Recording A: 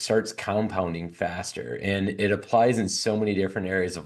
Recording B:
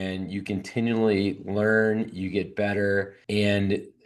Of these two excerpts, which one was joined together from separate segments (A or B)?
B